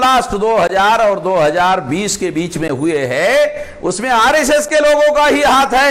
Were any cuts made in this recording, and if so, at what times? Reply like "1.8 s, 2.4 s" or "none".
none